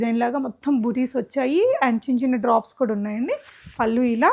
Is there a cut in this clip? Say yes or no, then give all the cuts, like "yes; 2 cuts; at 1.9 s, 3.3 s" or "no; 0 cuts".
no; 0 cuts